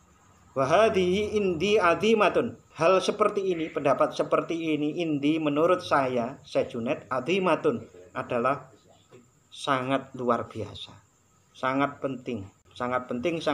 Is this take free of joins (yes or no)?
no